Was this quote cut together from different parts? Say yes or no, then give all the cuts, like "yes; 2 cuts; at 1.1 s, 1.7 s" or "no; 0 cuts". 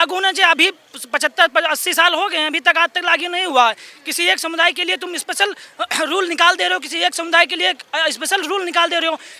no; 0 cuts